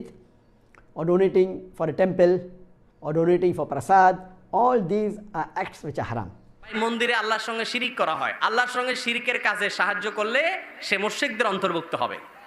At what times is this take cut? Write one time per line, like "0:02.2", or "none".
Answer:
0:06.7